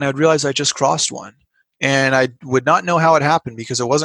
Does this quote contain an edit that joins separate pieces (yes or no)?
no